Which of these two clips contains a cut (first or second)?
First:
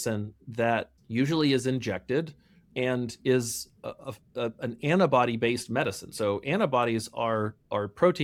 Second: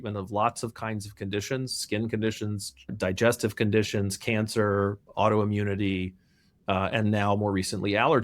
second